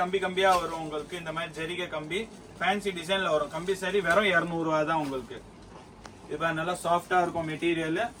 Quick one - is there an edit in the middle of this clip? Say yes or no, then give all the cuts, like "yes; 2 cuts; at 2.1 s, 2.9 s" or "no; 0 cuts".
no; 0 cuts